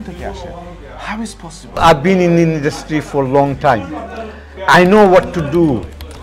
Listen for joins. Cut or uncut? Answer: cut